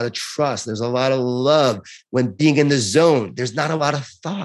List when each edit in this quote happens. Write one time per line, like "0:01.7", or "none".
0:01.9